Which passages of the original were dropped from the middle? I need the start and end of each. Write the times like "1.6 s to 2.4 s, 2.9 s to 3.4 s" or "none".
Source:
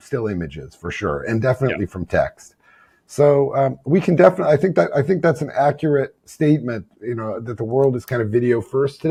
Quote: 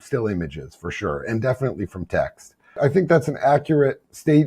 2.8 s to 4.9 s